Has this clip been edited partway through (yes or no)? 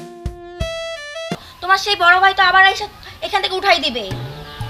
yes